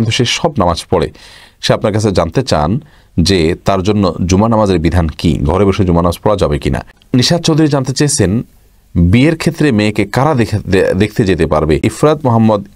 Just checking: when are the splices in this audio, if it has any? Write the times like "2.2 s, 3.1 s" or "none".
6.9 s, 11.8 s